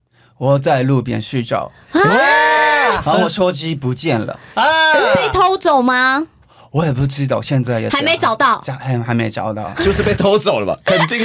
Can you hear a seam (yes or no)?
no